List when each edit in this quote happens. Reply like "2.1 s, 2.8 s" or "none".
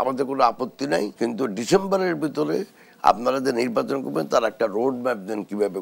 1.1 s